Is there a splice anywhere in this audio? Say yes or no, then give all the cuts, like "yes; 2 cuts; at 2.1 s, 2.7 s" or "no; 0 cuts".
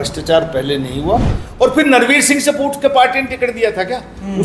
yes; 1 cut; at 1.4 s